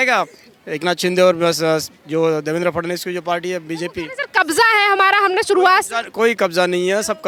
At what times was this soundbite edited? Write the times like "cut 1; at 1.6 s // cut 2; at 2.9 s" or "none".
none